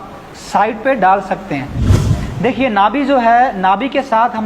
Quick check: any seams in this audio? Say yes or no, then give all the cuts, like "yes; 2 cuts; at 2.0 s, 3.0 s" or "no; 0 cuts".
yes; 1 cut; at 2.0 s